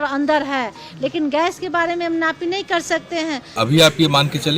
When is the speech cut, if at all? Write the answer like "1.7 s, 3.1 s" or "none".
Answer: 3.5 s